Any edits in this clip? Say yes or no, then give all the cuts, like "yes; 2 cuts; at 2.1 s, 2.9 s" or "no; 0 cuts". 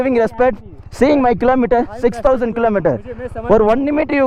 no; 0 cuts